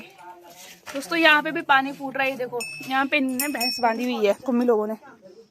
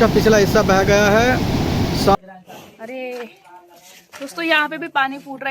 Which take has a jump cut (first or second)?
second